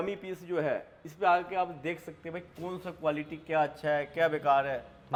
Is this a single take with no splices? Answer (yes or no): yes